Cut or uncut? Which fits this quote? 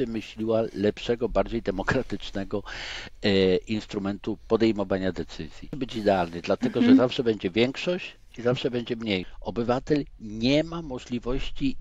cut